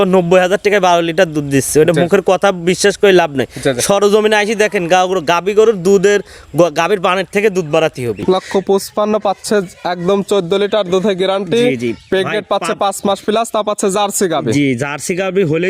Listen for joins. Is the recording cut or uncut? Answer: cut